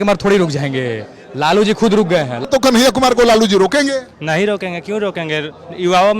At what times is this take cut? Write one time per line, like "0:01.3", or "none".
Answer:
0:02.5

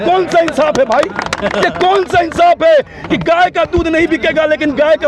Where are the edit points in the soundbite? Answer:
none

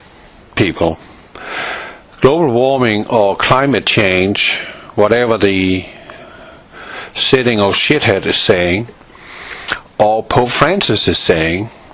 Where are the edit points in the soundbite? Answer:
none

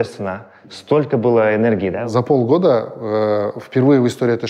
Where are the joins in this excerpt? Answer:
0:02.0

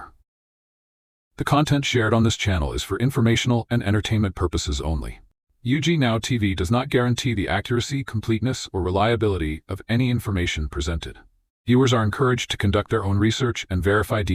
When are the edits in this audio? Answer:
none

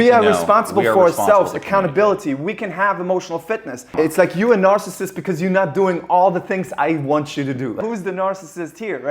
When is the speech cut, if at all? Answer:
0:03.9
0:07.8

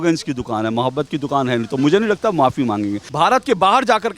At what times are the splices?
0:03.0

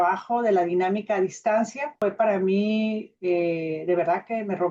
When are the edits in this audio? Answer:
0:01.9

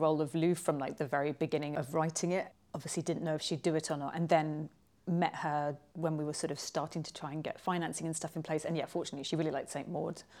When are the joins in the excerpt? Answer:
none

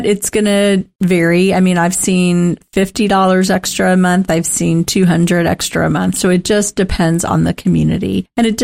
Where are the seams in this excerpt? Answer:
0:00.9

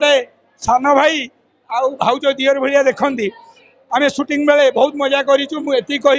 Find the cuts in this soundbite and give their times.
none

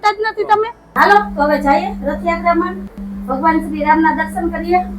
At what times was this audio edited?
0:01.0

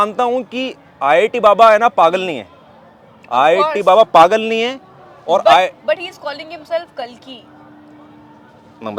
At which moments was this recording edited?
none

